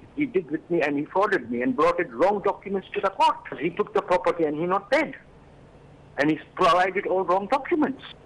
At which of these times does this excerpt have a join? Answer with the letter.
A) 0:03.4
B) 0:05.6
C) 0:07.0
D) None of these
B